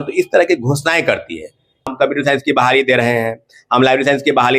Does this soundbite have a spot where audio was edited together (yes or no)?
yes